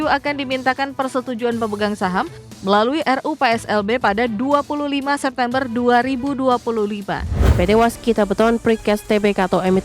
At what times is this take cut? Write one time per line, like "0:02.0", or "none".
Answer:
0:07.4

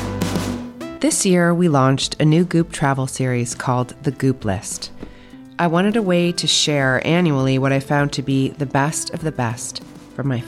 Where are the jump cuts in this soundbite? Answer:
0:00.9

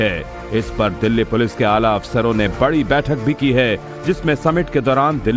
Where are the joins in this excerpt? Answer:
none

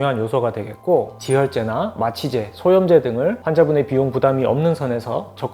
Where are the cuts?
0:01.1

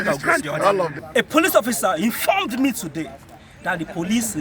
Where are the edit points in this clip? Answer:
0:01.0

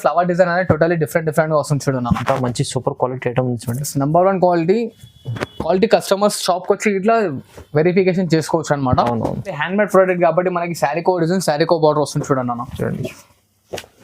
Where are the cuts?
0:09.6

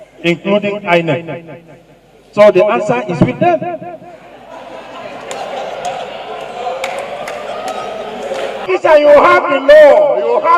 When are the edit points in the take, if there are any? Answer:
0:08.6

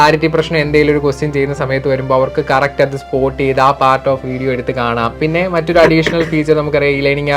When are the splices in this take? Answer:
0:05.2

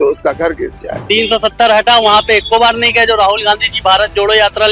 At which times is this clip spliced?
0:00.9

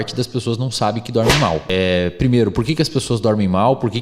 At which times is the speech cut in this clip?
0:01.6

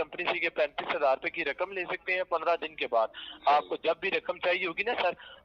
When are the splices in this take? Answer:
none

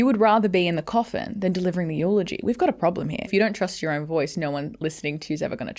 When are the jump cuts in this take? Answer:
0:03.3

